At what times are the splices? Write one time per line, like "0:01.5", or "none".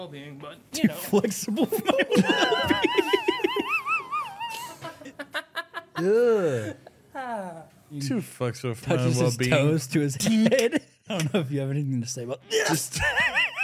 0:04.8
0:08.0
0:11.2